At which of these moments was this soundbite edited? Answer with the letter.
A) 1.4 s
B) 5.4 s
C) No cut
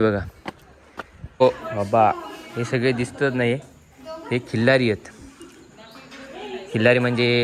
A